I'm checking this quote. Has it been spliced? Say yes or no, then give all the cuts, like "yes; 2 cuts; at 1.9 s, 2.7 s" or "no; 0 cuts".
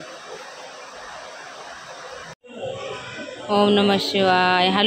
yes; 1 cut; at 2.4 s